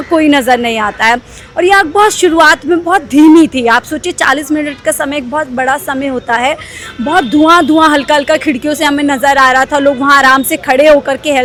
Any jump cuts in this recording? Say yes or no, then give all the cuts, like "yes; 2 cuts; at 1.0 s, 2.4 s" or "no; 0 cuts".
no; 0 cuts